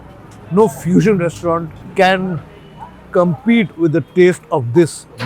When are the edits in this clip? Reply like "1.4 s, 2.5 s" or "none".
1.6 s